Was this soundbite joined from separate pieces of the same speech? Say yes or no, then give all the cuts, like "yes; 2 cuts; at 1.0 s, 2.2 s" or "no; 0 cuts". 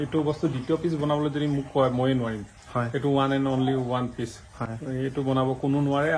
no; 0 cuts